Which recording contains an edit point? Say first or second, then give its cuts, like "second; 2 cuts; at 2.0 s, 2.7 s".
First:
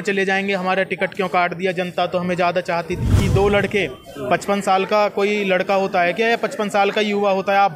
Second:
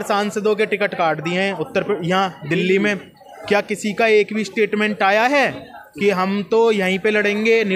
first; 1 cut; at 3.2 s